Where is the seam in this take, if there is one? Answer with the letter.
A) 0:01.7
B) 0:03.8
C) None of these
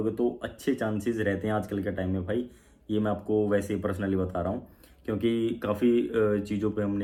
C